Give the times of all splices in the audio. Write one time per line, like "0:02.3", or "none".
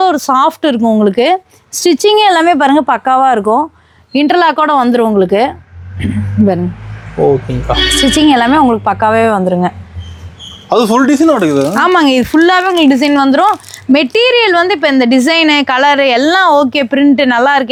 none